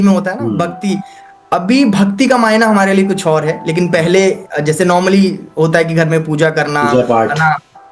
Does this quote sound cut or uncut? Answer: uncut